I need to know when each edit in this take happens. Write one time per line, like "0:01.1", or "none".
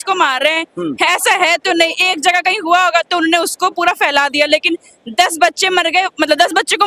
none

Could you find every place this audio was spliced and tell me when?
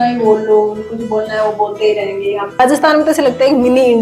0:02.6

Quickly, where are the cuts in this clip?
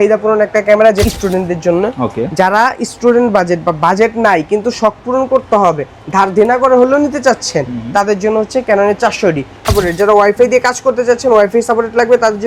0:01.0
0:09.7

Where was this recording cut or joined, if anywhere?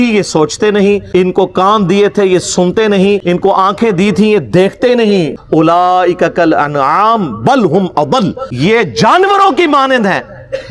0:01.0
0:03.2
0:05.4
0:08.4

